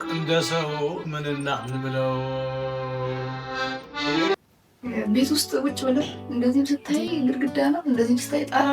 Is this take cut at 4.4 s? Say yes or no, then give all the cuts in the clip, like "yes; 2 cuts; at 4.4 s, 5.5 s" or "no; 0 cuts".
yes; 1 cut; at 4.4 s